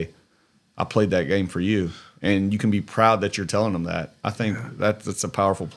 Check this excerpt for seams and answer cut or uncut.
uncut